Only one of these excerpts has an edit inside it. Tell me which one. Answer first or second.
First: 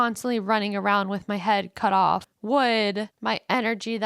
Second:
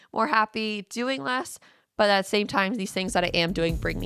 first